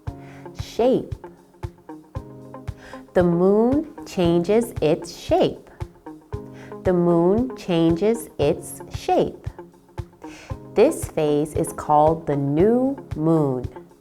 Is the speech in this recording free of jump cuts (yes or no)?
no